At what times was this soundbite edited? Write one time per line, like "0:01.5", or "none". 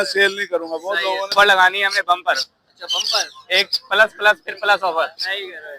0:01.3